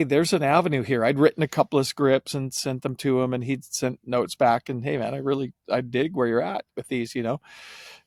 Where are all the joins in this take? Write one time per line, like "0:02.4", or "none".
none